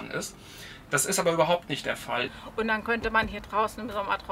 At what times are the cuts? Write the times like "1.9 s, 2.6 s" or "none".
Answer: 2.4 s